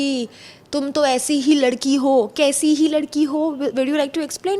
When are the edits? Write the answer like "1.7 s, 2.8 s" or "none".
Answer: none